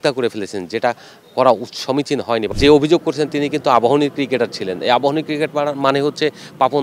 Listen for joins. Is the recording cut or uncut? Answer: cut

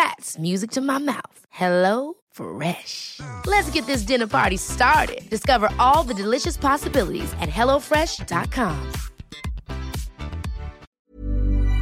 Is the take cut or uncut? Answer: cut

